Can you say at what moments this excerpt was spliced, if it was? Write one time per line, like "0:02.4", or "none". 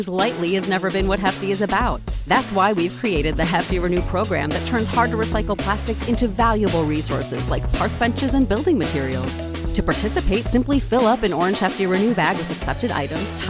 none

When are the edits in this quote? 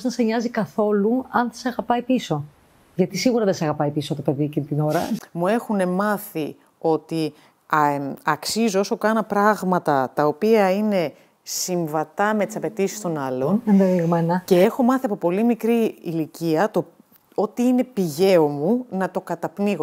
0:05.2

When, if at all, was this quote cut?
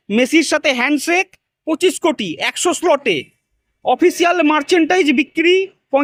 none

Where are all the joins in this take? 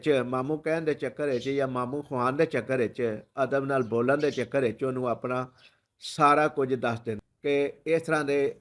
0:07.3

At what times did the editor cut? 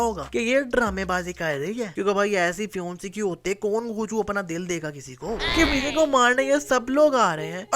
0:05.4

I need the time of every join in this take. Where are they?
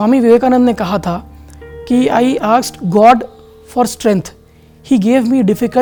none

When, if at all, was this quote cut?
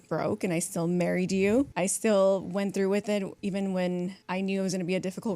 0:01.7
0:03.3
0:04.2

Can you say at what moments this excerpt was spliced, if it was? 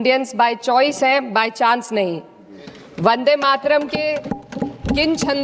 none

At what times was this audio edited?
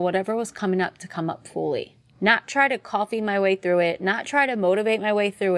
0:02.0

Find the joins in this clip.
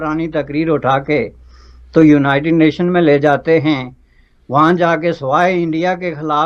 none

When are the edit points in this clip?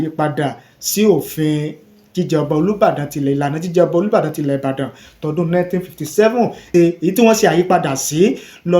0:06.7

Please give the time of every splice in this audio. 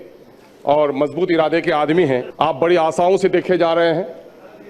0:02.3

